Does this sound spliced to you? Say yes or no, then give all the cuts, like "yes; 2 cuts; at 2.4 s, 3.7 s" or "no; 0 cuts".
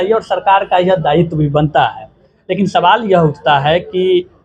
no; 0 cuts